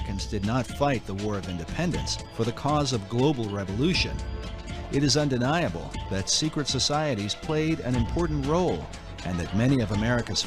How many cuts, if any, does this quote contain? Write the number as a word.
one